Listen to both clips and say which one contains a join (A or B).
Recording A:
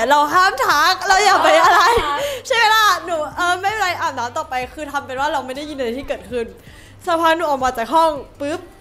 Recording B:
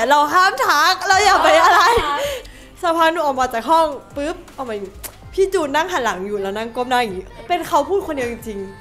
B